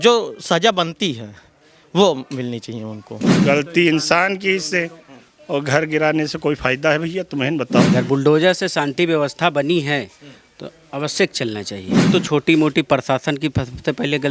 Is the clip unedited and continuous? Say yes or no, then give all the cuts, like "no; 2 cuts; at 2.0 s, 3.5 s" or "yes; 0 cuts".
no; 3 cuts; at 3.4 s, 7.9 s, 12.1 s